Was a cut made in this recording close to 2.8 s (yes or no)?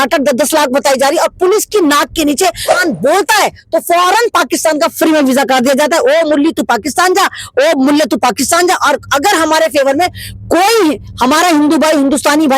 yes